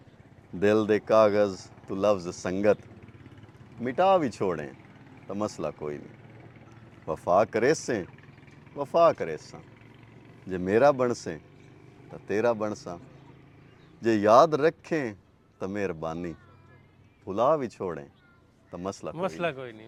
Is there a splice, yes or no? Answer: no